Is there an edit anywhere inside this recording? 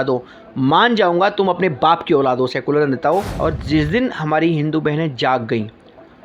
yes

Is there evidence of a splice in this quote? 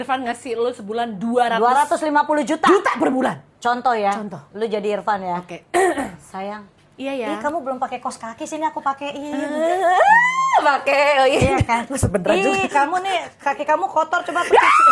no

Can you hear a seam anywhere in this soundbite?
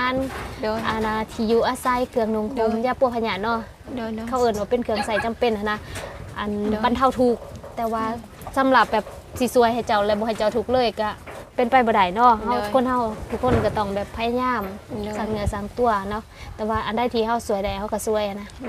no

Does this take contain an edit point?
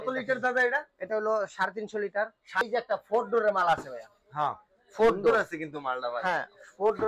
yes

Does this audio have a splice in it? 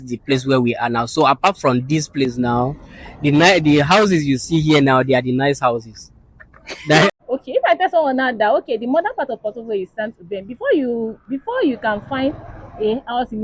yes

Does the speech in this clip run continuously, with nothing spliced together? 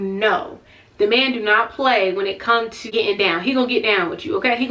no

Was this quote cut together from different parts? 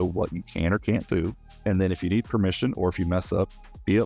no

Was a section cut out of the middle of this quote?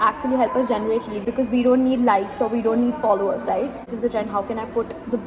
no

